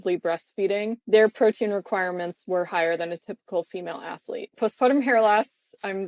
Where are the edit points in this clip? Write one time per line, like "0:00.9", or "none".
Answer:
0:01.0
0:04.5